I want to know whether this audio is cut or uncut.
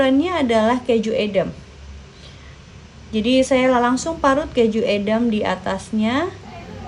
uncut